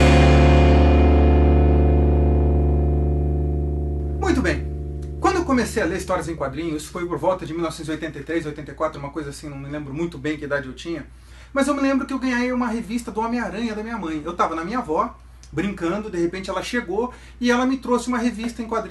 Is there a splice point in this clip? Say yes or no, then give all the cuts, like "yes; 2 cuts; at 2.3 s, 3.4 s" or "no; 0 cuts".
no; 0 cuts